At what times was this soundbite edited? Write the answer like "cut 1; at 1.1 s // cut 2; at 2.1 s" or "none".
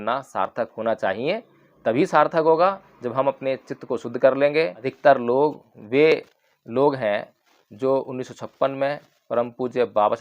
cut 1; at 4.8 s

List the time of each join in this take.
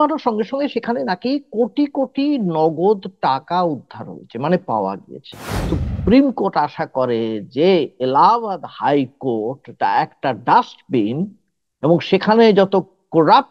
cut 1; at 5.7 s

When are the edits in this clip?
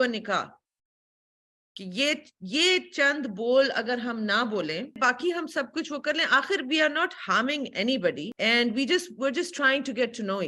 cut 1; at 5.0 s // cut 2; at 8.3 s

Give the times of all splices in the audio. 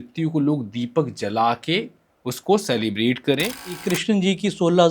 cut 1; at 3.8 s

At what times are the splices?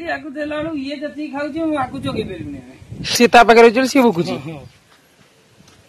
cut 1; at 3.2 s

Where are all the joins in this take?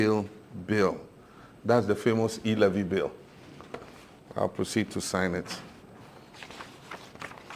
cut 1; at 5.8 s

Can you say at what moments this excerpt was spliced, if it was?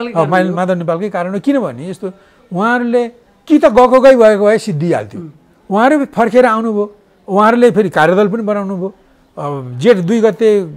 none

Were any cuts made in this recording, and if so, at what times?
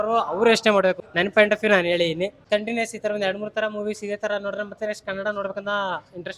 cut 1; at 1.0 s // cut 2; at 2.4 s

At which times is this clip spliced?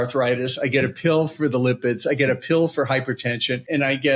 none

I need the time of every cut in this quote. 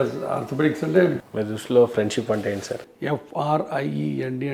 cut 1; at 1.2 s // cut 2; at 2.9 s

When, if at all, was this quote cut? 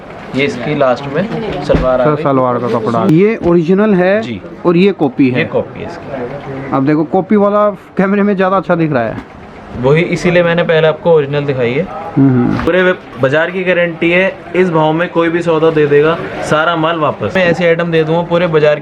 cut 1; at 3.1 s // cut 2; at 12.7 s // cut 3; at 17.3 s

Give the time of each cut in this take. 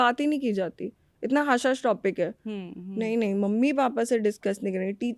none

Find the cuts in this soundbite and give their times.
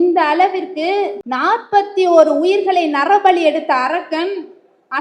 cut 1; at 1.2 s

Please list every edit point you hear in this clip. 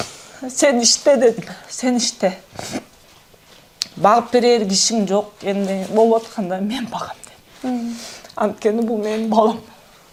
none

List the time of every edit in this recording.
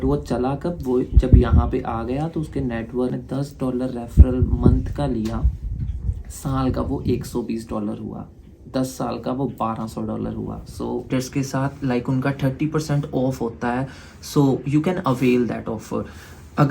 cut 1; at 3.1 s // cut 2; at 11.1 s

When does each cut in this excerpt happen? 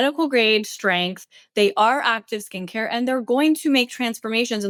none

